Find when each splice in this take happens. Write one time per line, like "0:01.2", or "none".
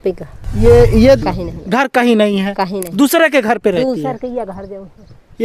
0:01.2